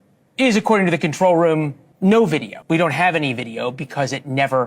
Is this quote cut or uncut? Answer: cut